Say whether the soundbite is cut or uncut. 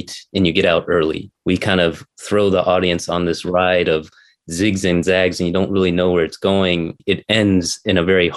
cut